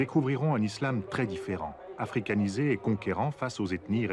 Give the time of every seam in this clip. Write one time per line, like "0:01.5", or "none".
0:02.7

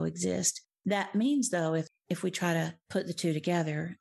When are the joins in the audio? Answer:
0:01.9
0:02.8

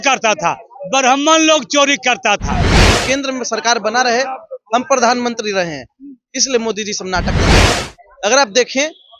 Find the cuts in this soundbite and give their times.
0:02.9
0:07.7

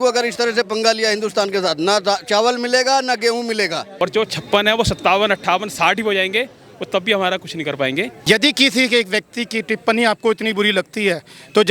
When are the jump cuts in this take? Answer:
0:03.9
0:08.1

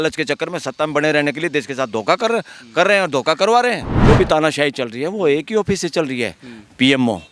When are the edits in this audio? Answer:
0:03.9

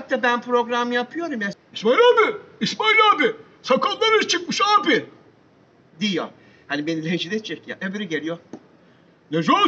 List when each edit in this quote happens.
0:01.5

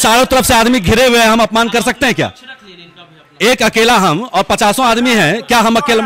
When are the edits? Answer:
none

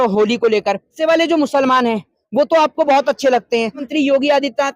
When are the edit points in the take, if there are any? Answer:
0:01.0
0:03.8

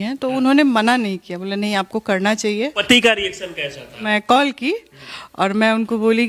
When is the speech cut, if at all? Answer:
0:02.8
0:04.1

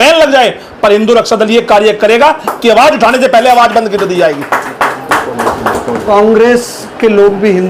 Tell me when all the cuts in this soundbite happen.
none

